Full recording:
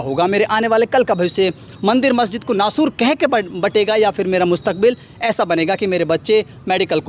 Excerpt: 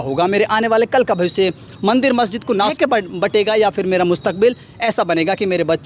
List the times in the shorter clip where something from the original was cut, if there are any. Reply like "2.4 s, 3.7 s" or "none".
2.7 s